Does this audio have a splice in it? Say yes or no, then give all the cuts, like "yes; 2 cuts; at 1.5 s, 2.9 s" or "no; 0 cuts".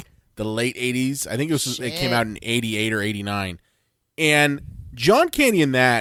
no; 0 cuts